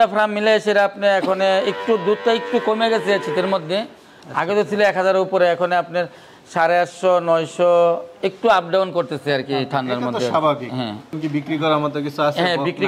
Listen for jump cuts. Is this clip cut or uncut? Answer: cut